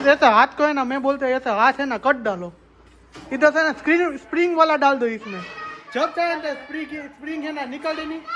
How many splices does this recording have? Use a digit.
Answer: 0